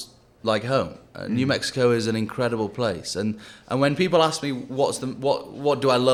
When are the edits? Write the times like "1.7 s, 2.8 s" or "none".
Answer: none